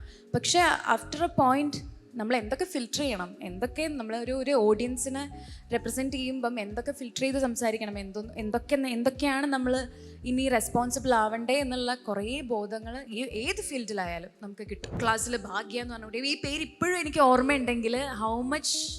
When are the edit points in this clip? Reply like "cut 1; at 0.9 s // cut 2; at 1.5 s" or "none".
cut 1; at 14.9 s